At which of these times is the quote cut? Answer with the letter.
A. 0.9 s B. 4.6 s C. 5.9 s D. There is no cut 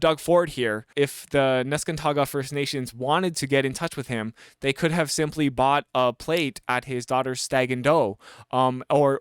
A